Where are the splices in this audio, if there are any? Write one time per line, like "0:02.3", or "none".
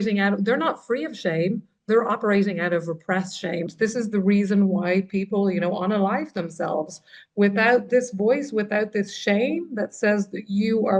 0:03.7